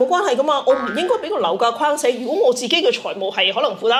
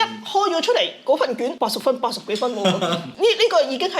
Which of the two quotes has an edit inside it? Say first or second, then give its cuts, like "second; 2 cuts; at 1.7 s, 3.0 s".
second; 2 cuts; at 1.5 s, 3.0 s